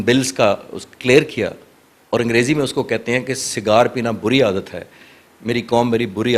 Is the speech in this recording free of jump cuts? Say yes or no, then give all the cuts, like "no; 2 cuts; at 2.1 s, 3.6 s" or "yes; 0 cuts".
yes; 0 cuts